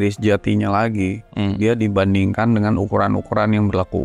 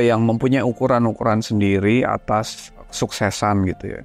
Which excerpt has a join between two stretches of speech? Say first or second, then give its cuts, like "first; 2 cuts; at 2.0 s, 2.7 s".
second; 1 cut; at 2.9 s